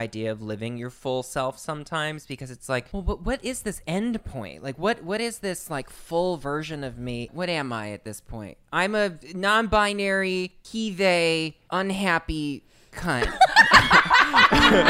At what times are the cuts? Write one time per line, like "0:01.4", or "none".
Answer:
0:02.9
0:07.3
0:09.2